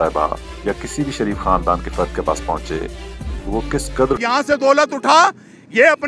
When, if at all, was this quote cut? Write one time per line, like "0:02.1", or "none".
0:04.2